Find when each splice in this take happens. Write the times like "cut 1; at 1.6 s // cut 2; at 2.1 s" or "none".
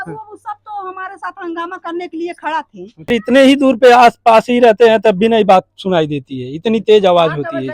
cut 1; at 3.1 s